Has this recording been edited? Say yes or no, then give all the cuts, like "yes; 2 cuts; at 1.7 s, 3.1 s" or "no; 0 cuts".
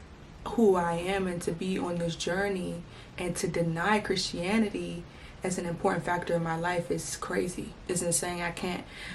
no; 0 cuts